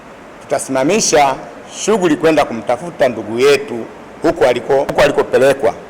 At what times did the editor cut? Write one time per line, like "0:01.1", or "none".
0:04.9